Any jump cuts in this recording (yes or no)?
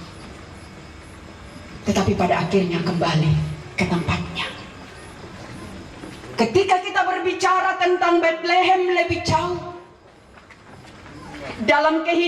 no